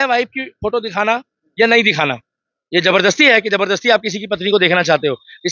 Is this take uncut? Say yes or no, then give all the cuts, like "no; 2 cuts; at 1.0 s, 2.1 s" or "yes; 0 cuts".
yes; 0 cuts